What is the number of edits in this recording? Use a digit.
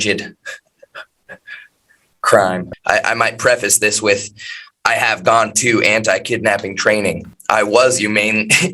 2